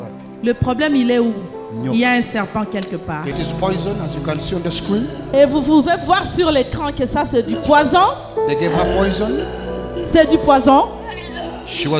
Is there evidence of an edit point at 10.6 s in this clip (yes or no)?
no